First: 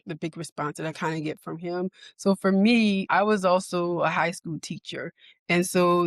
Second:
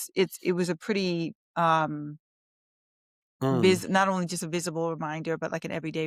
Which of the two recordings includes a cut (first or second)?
first